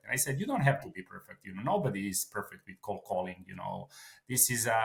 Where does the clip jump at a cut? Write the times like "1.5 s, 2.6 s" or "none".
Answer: none